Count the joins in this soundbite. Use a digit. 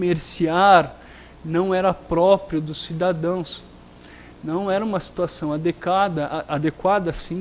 1